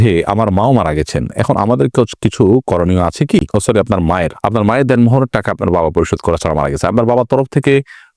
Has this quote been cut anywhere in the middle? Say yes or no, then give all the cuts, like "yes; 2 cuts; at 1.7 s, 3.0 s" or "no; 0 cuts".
no; 0 cuts